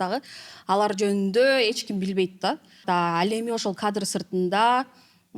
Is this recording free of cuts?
yes; 0 cuts

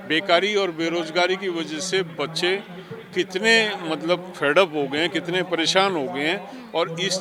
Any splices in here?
no; 0 cuts

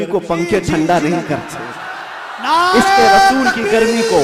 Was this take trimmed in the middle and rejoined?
no; 0 cuts

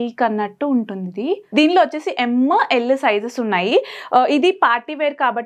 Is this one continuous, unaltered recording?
no; 1 cut; at 1.4 s

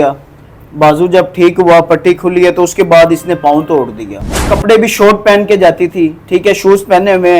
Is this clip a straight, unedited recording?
no; 1 cut; at 4.5 s

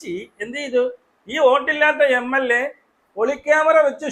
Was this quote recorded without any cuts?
yes; 0 cuts

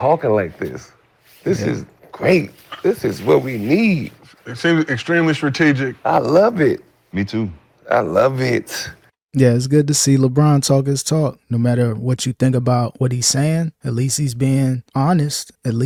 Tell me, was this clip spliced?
no; 0 cuts

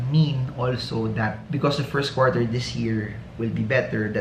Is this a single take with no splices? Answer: yes; 0 cuts

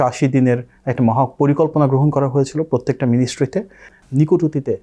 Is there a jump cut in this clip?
yes; 1 cut; at 3.8 s

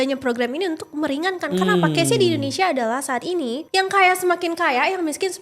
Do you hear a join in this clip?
yes; 1 cut; at 3.6 s

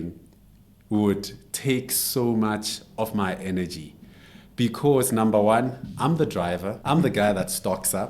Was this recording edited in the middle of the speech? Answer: yes; 1 cut; at 6.7 s

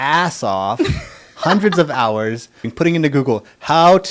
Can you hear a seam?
yes; 1 cut; at 2.7 s

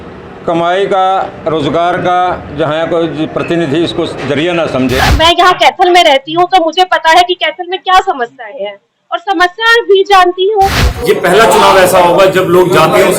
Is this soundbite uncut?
no; 2 cuts; at 5.0 s, 10.9 s

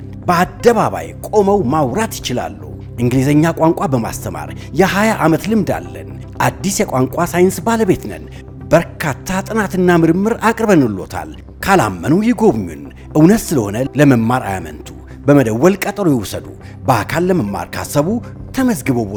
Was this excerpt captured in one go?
yes; 0 cuts

